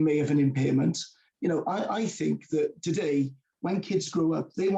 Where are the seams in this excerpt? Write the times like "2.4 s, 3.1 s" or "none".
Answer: none